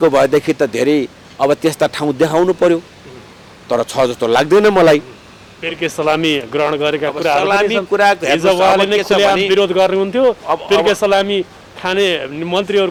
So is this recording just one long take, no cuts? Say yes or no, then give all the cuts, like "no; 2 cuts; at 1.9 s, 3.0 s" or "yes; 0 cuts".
yes; 0 cuts